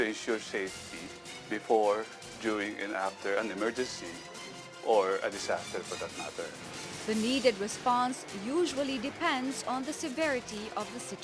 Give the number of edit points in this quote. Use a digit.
0